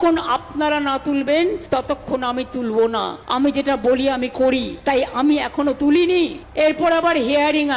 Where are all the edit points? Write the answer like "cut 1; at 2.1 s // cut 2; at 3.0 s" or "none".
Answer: cut 1; at 1.6 s // cut 2; at 3.2 s // cut 3; at 5.0 s // cut 4; at 6.4 s